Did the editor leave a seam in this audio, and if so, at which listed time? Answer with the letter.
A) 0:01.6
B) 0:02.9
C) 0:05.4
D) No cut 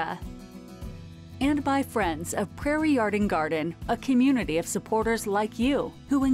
D